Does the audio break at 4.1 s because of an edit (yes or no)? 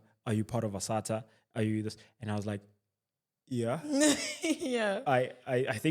no